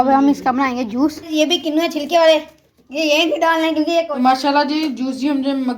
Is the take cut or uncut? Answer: cut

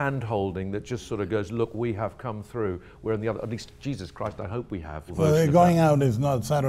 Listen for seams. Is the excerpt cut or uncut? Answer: cut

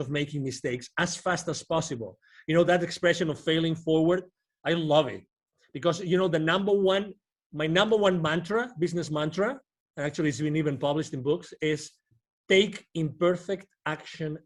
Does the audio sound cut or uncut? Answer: uncut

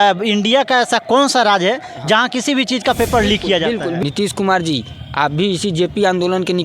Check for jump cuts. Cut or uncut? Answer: cut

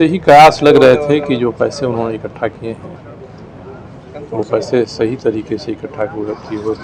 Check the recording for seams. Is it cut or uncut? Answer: uncut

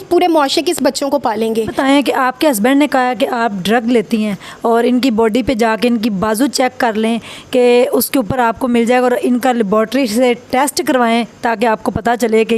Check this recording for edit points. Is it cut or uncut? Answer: cut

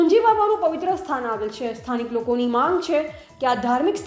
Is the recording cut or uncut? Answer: uncut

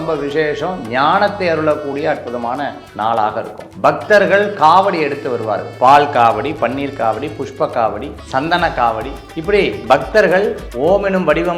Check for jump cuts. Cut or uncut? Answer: cut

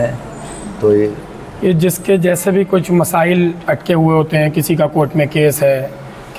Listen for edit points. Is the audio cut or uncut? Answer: uncut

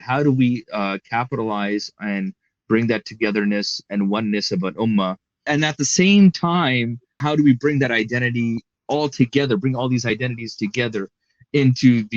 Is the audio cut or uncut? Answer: cut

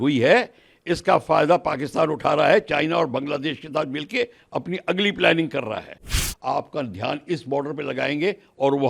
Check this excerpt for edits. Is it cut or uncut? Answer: cut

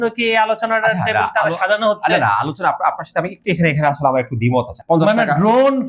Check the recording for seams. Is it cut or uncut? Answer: cut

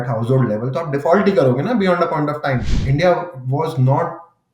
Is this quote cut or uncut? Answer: cut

